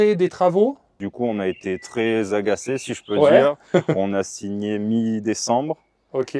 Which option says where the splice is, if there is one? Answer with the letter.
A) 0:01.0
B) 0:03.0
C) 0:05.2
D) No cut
A